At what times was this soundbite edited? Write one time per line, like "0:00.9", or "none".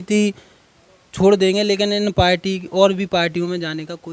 none